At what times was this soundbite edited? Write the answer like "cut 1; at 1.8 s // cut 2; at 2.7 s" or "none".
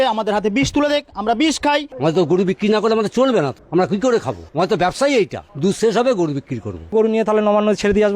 cut 1; at 1.9 s // cut 2; at 3.6 s // cut 3; at 4.4 s // cut 4; at 5.4 s // cut 5; at 6.9 s